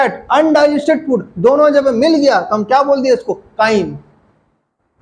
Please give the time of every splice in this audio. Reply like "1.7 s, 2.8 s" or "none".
none